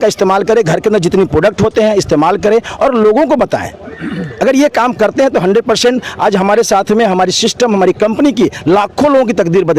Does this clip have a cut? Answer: no; 0 cuts

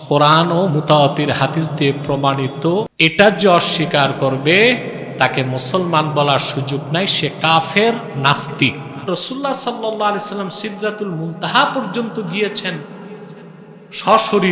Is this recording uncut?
no; 2 cuts; at 2.9 s, 9.1 s

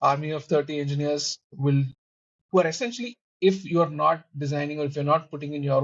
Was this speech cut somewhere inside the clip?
no; 0 cuts

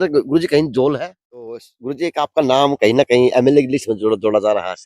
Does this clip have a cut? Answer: yes; 1 cut; at 1.7 s

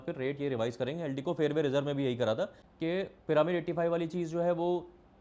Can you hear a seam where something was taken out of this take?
yes; 1 cut; at 2.6 s

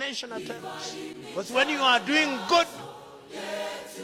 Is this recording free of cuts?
yes; 0 cuts

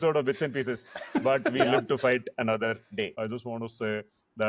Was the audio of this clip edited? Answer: yes; 1 cut; at 3.2 s

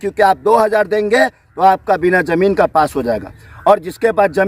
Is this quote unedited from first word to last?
yes; 0 cuts

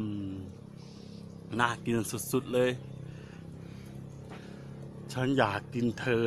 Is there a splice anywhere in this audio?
no; 0 cuts

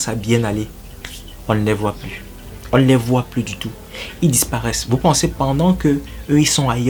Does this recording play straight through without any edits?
yes; 0 cuts

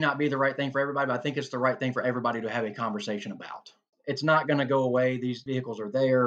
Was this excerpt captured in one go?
no; 2 cuts; at 3.9 s, 5.4 s

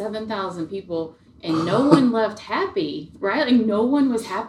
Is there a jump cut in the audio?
no; 0 cuts

